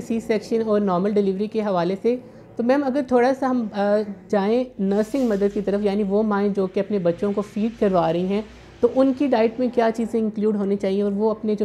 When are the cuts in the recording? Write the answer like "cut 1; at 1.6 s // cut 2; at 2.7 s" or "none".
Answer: none